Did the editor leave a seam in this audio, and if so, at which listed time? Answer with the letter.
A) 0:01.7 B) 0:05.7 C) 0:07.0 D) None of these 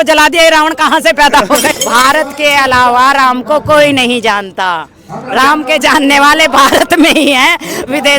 A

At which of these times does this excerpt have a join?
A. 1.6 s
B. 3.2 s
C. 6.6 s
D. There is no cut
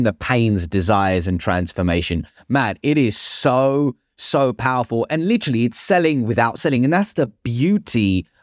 C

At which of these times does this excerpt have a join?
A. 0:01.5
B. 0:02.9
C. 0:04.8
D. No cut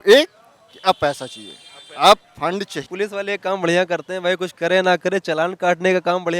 B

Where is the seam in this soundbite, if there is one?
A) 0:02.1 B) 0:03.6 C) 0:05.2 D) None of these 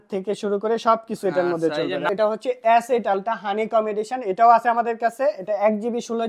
A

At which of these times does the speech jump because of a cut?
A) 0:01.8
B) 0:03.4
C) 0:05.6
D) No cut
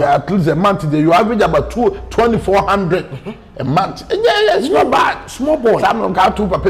D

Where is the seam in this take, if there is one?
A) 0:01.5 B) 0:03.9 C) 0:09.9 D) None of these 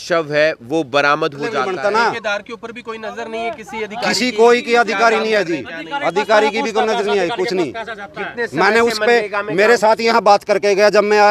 A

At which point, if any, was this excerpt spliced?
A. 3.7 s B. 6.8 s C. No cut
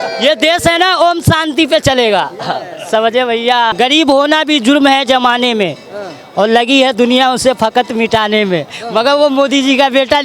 A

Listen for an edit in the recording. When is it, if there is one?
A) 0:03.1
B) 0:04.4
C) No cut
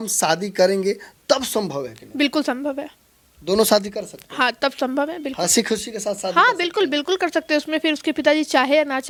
C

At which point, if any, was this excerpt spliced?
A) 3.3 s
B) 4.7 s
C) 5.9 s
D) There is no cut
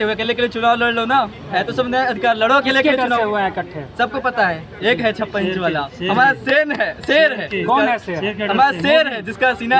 D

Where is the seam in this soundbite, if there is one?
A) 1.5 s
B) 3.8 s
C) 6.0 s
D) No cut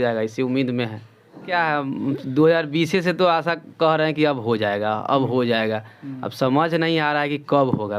A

